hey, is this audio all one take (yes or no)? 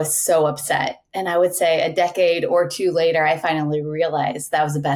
yes